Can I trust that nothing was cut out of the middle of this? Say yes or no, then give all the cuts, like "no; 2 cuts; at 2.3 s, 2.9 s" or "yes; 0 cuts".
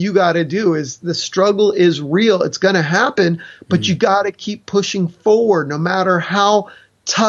yes; 0 cuts